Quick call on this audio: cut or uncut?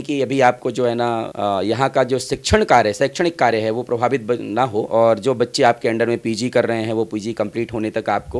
uncut